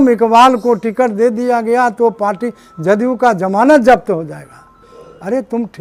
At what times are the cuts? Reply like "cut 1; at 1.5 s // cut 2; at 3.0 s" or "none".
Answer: none